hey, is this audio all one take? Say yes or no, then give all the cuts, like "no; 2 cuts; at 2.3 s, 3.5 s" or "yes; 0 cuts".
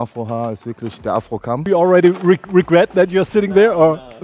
no; 1 cut; at 1.7 s